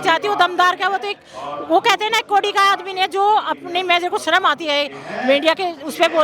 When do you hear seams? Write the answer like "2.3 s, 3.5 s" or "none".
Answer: none